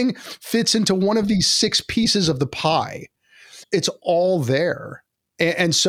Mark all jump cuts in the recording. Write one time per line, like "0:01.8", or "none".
0:03.5